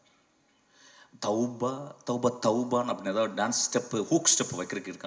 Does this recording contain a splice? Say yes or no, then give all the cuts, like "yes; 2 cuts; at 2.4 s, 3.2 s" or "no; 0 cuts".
no; 0 cuts